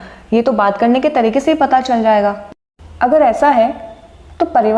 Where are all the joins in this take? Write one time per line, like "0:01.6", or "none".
0:02.4